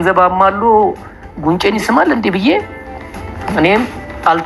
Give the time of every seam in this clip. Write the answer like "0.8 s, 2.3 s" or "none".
none